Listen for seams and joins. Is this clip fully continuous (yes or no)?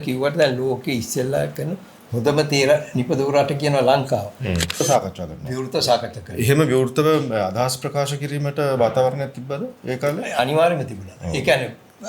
no